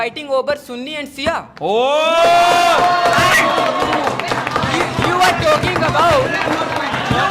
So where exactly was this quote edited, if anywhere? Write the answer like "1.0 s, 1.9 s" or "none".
none